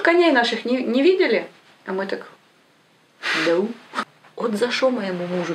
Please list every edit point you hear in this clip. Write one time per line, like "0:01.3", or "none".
0:03.9